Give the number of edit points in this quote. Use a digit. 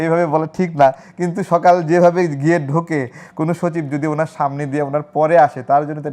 0